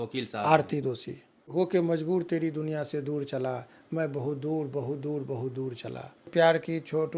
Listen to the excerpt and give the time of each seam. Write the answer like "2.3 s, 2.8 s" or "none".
1.5 s, 6.3 s

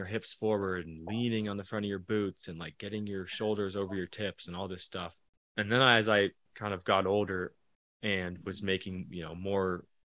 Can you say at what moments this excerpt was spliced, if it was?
5.2 s, 6.5 s

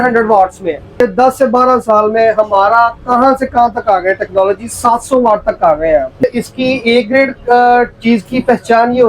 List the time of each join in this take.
1.0 s, 6.2 s

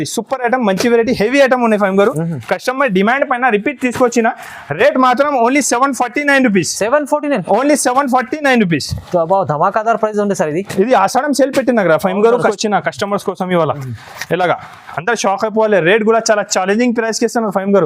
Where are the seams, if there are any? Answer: 12.5 s

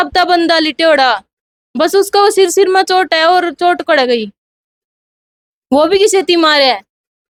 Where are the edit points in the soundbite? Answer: none

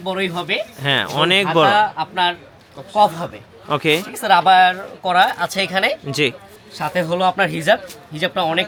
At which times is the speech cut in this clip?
none

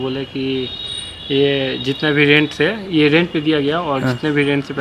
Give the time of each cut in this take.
none

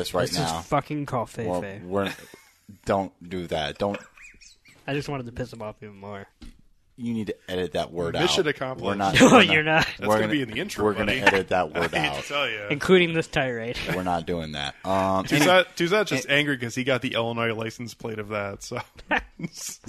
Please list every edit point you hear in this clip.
none

